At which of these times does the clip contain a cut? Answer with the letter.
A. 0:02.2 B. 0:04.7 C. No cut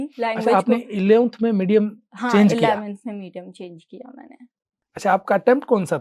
B